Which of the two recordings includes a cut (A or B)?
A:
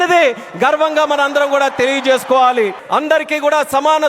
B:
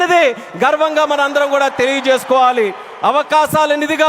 A